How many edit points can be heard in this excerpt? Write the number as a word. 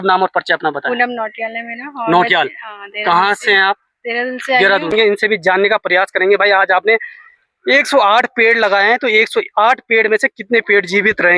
one